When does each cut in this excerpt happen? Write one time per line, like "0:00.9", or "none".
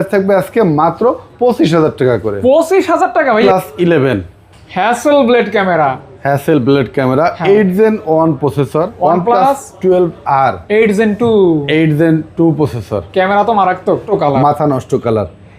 0:03.4
0:08.9
0:14.0